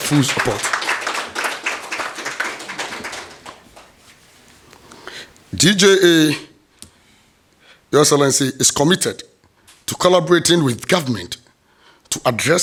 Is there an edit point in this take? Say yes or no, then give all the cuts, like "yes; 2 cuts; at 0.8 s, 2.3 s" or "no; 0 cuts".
no; 0 cuts